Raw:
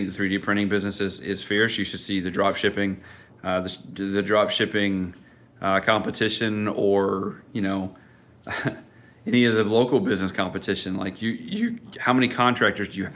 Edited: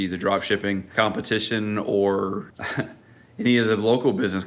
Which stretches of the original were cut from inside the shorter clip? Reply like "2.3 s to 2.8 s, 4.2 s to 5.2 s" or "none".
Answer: 3.1 s to 5.8 s, 7.4 s to 8.4 s